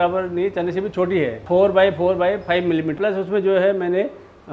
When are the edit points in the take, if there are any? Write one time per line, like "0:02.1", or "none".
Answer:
0:01.4
0:03.0